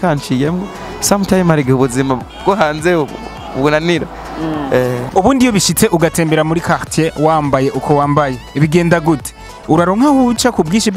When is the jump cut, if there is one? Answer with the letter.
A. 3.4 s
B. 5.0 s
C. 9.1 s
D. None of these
B